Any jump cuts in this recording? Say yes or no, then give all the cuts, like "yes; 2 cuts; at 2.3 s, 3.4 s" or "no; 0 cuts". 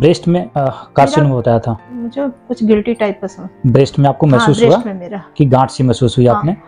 yes; 1 cut; at 1.8 s